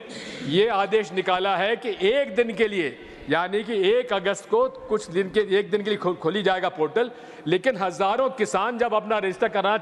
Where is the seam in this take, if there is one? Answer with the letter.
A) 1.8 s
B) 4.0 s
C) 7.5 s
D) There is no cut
D